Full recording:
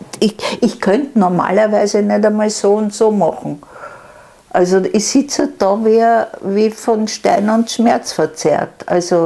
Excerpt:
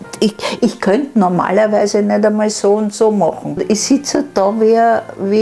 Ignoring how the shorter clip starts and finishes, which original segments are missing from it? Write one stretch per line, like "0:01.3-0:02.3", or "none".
0:03.6-0:04.9